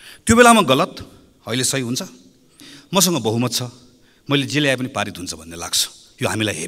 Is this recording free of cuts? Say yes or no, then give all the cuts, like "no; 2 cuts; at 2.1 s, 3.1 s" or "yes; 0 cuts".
no; 1 cut; at 2.7 s